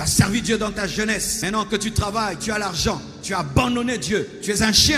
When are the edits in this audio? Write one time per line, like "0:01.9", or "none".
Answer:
0:01.3